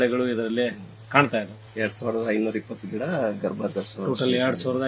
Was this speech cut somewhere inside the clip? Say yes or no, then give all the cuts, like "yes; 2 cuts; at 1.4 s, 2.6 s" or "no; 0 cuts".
yes; 1 cut; at 1.6 s